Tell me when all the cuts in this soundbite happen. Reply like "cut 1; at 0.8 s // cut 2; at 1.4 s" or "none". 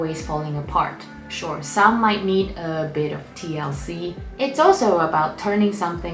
cut 1; at 4.2 s